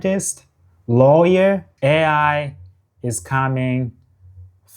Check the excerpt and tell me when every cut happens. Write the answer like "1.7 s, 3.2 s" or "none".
1.7 s